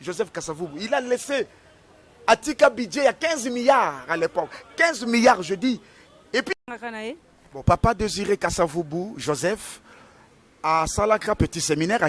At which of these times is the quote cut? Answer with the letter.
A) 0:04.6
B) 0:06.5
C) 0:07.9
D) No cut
B